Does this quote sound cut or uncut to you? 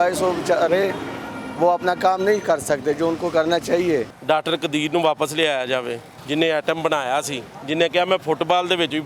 cut